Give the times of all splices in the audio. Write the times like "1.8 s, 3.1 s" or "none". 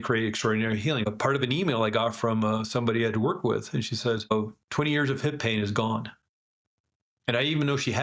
1.0 s